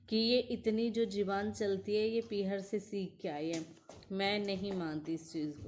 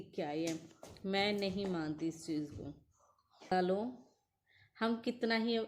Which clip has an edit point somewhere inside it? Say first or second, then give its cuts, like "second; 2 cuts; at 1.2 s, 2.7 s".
second; 1 cut; at 3.5 s